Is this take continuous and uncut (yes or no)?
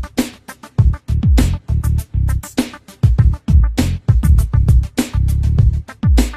yes